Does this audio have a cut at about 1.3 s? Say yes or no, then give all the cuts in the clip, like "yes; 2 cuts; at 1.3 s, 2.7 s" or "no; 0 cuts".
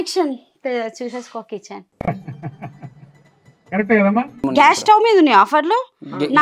no; 1 cut; at 4.4 s